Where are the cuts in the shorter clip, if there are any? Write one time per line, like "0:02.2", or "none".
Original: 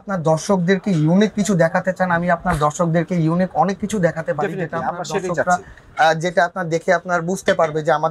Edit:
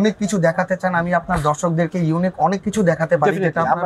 none